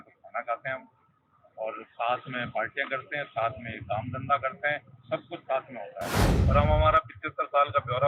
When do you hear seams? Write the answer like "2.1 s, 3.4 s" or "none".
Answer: 6.3 s